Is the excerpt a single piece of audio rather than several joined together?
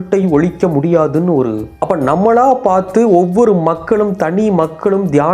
no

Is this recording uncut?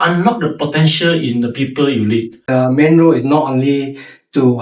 no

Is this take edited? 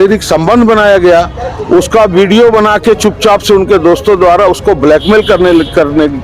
no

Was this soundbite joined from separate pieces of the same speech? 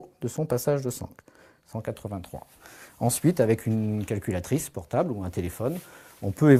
no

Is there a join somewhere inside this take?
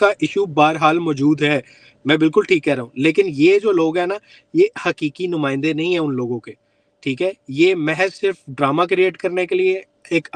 no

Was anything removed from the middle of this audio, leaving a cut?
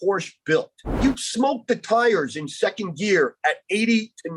yes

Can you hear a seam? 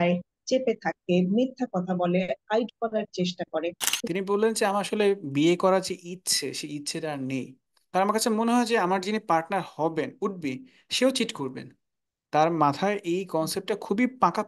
yes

